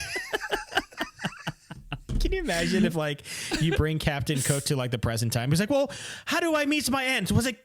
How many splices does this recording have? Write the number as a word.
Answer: zero